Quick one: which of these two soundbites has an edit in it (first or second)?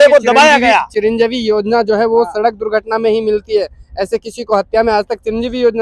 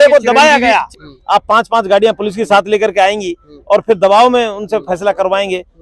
second